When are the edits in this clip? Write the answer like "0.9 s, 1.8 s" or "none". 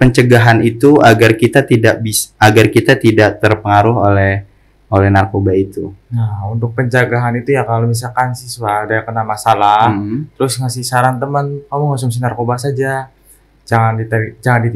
none

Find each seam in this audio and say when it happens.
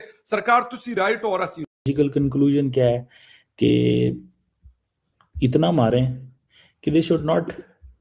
1.7 s

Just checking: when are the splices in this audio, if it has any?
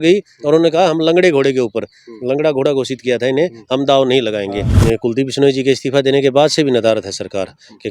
4.7 s

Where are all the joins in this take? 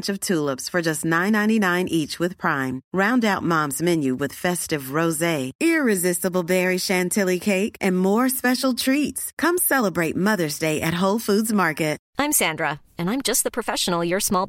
12.0 s

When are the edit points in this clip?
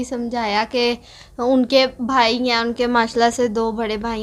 none

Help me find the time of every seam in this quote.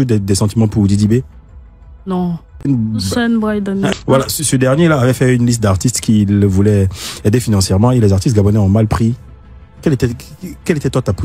2.7 s, 3.9 s

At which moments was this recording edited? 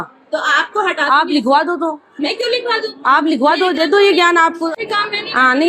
4.8 s

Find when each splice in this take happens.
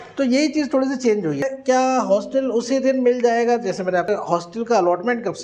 1.5 s, 4.1 s

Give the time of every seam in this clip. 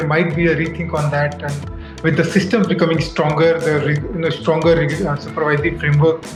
none

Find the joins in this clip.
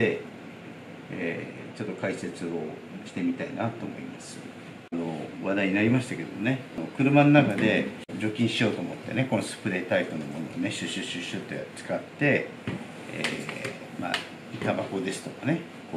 4.9 s, 6.8 s, 8.1 s

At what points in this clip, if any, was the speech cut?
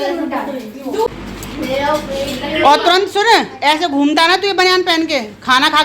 1.1 s

